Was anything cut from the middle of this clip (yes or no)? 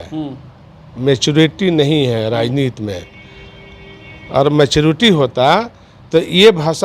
no